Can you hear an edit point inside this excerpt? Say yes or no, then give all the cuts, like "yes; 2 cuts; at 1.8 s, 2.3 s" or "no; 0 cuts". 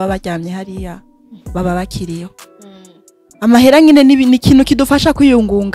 no; 0 cuts